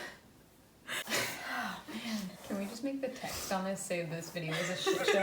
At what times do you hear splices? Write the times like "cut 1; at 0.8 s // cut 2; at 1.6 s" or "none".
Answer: cut 1; at 1.0 s